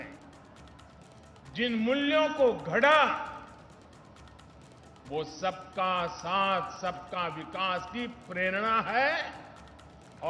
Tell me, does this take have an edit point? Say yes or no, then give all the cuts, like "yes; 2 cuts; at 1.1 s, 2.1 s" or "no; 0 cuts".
no; 0 cuts